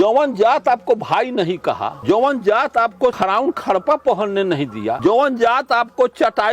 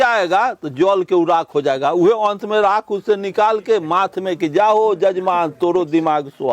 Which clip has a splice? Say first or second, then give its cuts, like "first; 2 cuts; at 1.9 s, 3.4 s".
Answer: first; 3 cuts; at 2.0 s, 3.2 s, 5.0 s